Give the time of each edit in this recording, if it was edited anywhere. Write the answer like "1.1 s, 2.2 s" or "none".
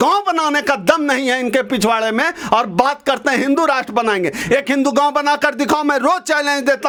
none